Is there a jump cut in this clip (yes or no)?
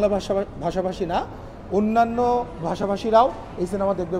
no